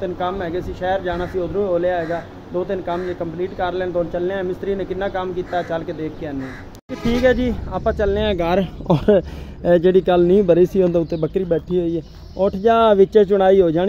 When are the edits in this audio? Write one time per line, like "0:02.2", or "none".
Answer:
0:06.7